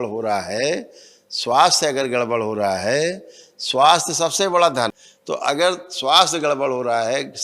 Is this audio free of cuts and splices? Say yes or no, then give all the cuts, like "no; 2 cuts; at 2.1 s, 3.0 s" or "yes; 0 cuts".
no; 1 cut; at 5.1 s